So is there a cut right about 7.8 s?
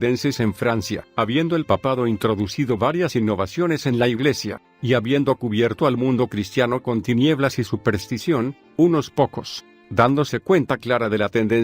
no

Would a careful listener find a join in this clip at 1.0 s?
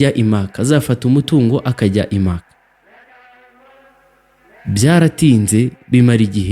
no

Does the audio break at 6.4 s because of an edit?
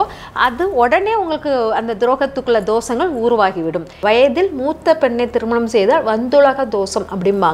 no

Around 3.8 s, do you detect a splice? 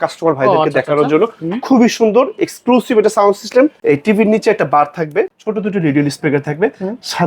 yes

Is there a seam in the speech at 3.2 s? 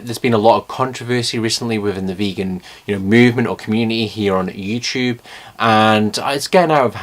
no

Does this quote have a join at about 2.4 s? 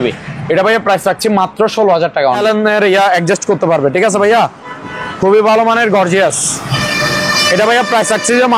yes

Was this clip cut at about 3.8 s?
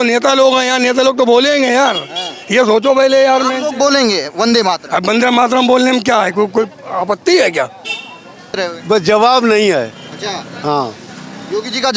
no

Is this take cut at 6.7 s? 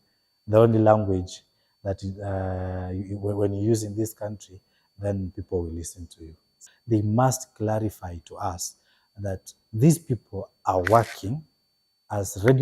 yes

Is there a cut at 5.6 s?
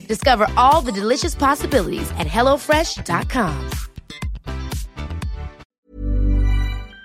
yes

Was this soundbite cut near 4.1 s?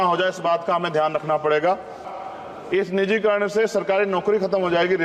no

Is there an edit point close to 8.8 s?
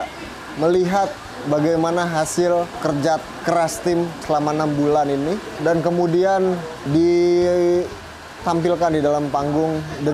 no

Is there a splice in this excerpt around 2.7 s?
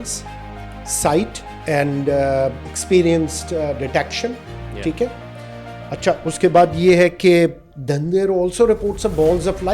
no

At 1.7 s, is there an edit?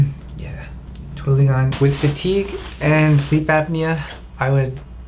yes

